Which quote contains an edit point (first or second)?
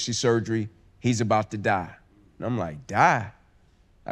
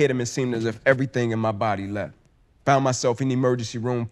second